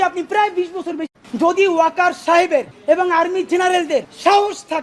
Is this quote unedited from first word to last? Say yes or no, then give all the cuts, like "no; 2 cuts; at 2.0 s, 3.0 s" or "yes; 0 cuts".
no; 1 cut; at 1.2 s